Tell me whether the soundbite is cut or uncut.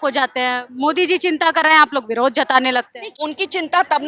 cut